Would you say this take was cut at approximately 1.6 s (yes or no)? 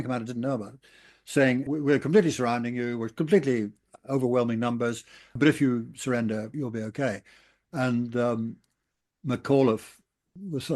yes